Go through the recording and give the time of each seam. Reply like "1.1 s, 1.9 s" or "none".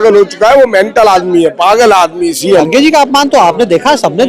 2.7 s